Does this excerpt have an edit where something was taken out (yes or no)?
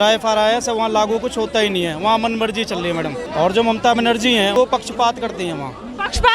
yes